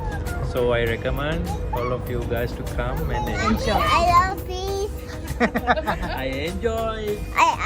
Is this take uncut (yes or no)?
no